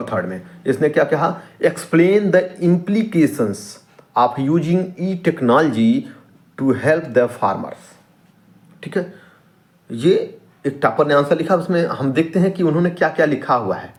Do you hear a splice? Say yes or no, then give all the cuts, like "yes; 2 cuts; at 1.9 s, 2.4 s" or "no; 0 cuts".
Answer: no; 0 cuts